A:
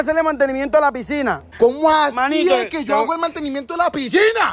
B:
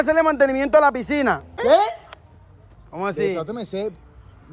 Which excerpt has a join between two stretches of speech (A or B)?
A